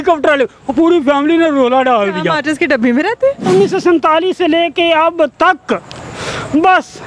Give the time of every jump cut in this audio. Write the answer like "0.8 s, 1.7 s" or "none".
3.5 s